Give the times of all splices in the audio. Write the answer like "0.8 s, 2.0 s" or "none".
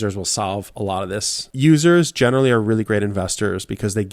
1.4 s